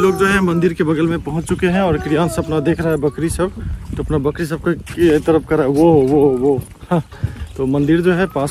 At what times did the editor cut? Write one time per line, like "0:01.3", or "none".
none